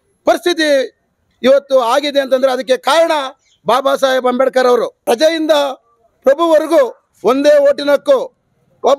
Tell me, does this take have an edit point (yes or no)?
yes